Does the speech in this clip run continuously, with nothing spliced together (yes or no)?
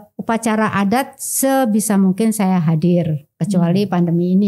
yes